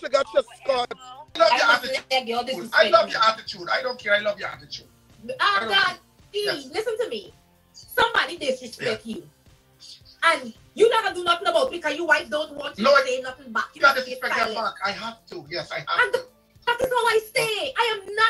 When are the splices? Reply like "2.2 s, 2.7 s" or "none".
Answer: 1.4 s

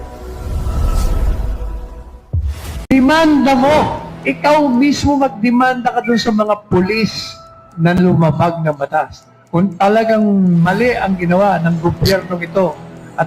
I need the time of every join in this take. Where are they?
2.9 s

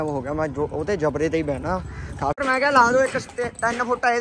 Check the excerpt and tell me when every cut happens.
2.4 s

